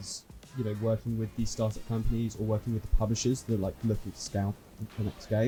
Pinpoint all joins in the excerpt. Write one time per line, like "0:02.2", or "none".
none